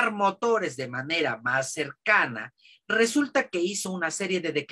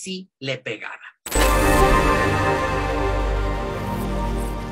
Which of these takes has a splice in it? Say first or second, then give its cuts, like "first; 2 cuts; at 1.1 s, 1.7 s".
second; 1 cut; at 1.1 s